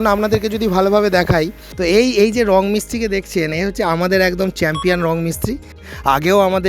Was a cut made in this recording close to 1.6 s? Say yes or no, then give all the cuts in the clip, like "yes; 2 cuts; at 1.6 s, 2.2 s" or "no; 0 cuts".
yes; 1 cut; at 1.6 s